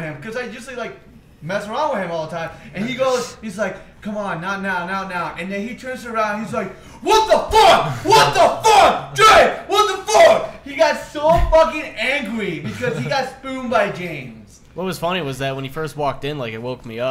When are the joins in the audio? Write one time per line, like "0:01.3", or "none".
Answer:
0:08.9